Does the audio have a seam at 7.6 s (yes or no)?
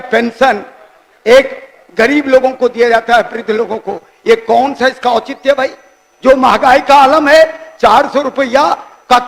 no